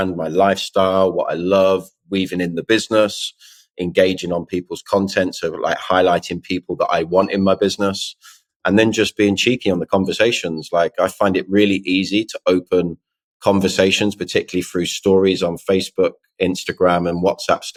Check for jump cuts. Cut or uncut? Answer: uncut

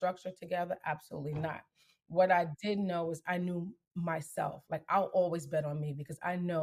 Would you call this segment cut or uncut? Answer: uncut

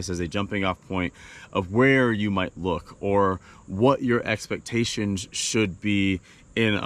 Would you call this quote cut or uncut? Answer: uncut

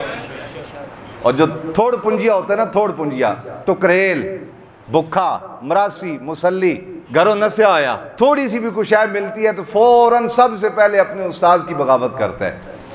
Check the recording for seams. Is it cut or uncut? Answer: cut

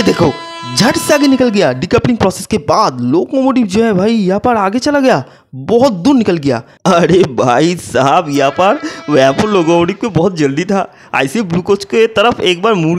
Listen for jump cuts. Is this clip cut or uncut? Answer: cut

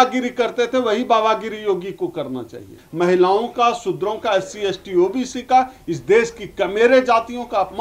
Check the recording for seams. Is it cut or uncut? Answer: cut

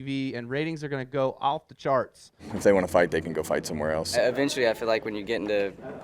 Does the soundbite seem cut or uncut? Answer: cut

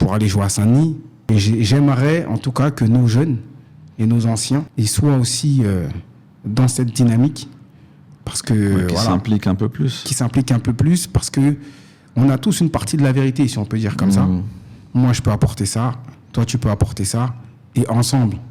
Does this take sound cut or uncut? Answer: cut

